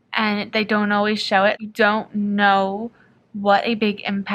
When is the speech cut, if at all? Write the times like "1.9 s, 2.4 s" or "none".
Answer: 1.6 s